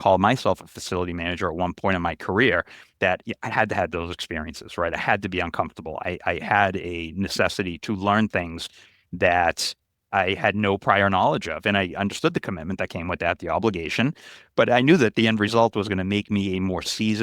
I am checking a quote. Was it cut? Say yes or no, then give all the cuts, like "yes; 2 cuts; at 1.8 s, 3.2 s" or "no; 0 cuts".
yes; 2 cuts; at 7.8 s, 10.1 s